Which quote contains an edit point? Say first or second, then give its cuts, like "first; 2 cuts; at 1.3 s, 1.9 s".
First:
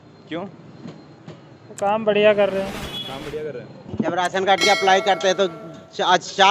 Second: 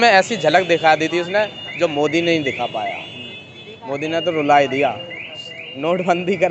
first; 1 cut; at 3.8 s